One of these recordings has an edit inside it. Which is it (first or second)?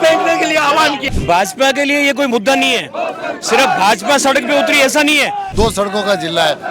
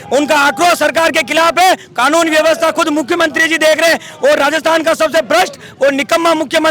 first